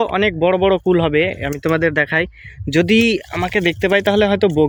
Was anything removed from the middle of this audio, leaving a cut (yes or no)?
no